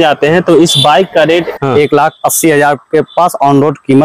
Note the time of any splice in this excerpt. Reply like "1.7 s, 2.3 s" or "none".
1.5 s